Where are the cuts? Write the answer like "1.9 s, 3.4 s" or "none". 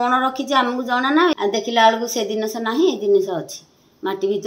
1.3 s